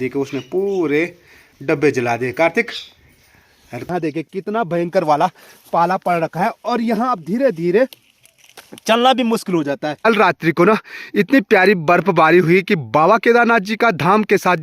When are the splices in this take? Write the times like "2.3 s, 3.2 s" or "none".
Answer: 3.7 s, 10.1 s